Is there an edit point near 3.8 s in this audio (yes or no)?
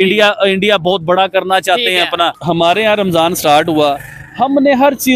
no